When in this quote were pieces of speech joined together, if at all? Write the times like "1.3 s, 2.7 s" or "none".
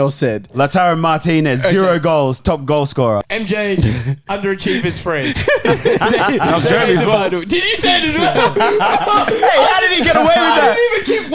3.2 s